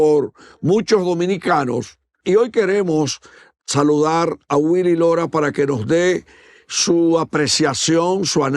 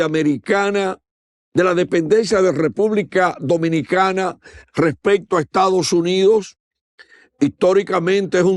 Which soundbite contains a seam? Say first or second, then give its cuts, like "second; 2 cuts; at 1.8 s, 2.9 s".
first; 1 cut; at 2.2 s